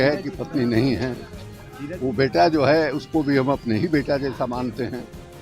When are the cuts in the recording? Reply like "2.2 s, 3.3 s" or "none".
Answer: none

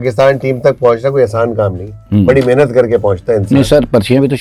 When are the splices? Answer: none

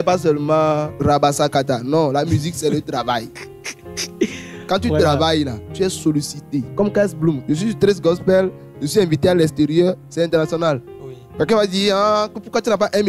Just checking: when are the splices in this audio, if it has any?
0.9 s, 5.6 s, 6.7 s, 7.4 s

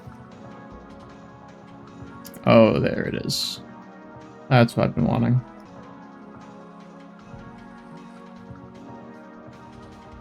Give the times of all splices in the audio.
5.6 s

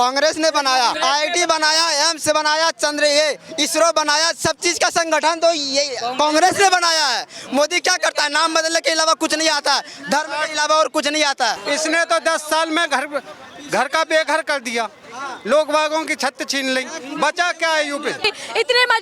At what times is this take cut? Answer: 1.0 s, 11.6 s, 18.3 s

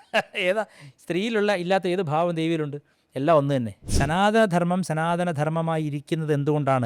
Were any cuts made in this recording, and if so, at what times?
3.8 s

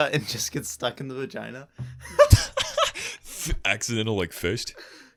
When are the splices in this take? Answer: none

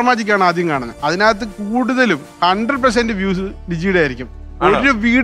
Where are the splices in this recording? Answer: 0.9 s, 2.3 s

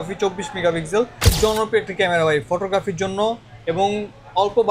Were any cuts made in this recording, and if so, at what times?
1.3 s

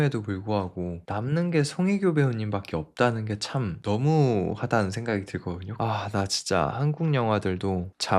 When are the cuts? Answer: 5.7 s

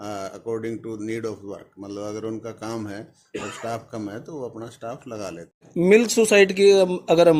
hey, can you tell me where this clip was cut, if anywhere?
5.7 s

